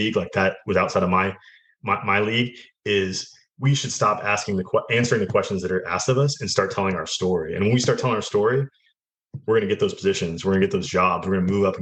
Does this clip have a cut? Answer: no; 0 cuts

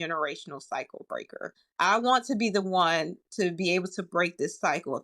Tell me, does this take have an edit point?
yes; 1 cut; at 1.6 s

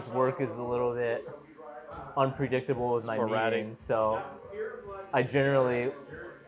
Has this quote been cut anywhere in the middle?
no; 0 cuts

